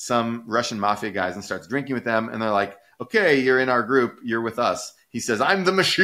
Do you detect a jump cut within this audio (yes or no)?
no